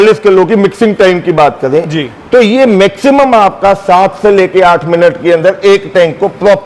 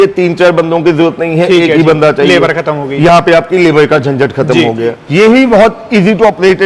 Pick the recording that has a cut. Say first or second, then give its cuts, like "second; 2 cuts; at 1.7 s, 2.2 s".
second; 1 cut; at 5.0 s